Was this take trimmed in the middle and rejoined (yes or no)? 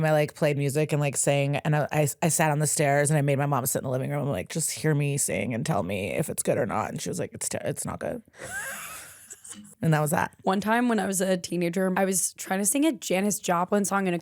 yes